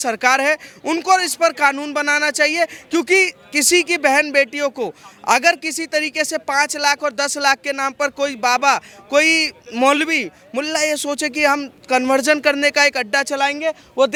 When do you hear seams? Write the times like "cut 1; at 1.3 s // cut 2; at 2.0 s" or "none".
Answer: none